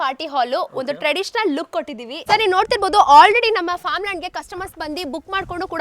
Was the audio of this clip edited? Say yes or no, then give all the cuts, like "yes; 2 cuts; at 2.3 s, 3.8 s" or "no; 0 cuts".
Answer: yes; 1 cut; at 2.2 s